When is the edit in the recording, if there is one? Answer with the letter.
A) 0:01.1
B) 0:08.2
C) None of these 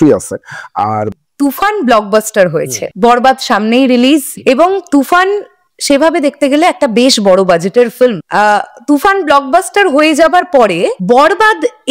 A